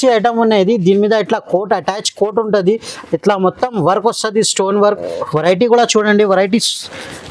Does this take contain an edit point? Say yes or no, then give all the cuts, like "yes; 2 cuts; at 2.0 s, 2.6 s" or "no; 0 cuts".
no; 0 cuts